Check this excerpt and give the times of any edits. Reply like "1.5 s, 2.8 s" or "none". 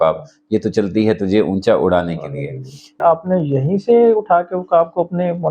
3.0 s